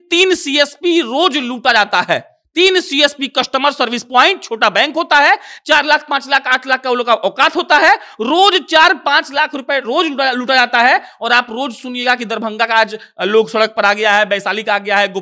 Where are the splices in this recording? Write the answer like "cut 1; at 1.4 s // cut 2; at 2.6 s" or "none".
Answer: none